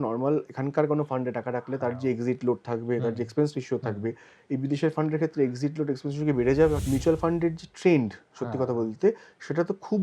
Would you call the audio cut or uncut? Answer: cut